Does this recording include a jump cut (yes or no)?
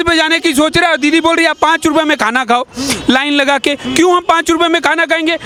no